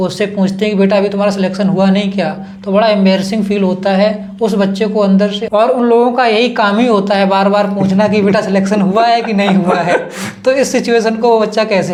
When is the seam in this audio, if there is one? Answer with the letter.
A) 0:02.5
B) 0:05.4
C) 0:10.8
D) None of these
D